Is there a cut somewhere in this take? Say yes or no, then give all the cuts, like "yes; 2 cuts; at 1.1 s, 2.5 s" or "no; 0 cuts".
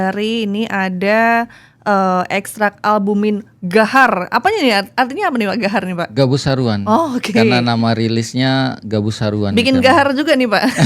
no; 0 cuts